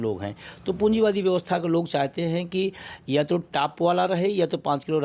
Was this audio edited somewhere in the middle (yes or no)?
no